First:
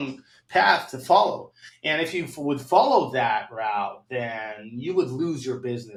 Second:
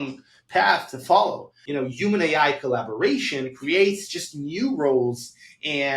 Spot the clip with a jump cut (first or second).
second